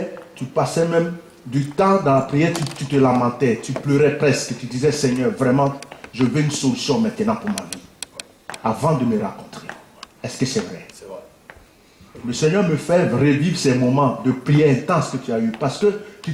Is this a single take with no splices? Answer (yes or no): yes